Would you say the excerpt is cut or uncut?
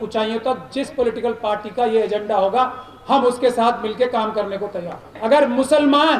cut